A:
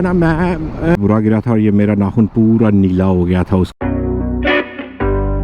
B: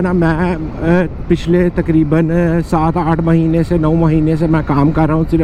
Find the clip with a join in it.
A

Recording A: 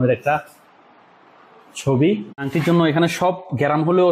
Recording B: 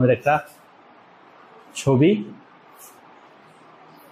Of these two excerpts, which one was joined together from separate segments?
A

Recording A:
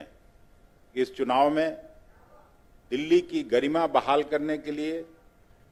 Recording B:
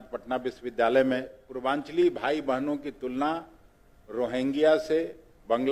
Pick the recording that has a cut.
B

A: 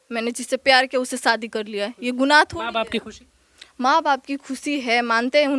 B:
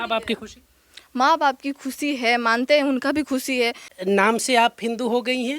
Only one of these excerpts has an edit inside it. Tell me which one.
B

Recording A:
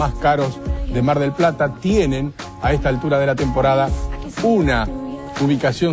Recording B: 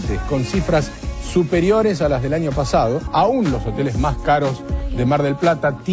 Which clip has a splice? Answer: B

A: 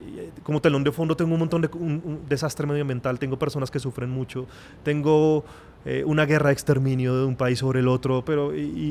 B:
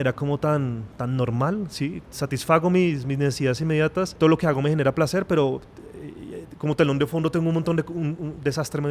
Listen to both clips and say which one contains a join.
B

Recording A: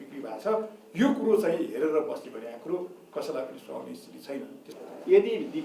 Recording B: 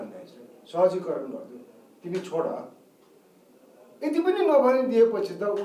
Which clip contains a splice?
A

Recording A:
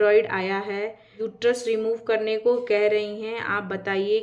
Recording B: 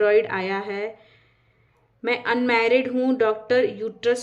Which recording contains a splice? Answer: A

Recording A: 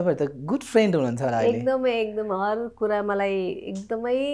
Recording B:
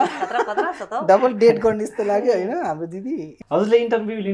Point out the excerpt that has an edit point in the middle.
B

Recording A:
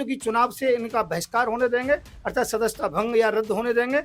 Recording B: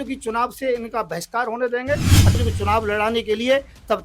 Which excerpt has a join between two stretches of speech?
B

